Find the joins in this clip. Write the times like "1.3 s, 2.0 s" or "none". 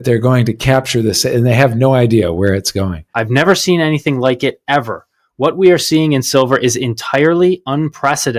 3.1 s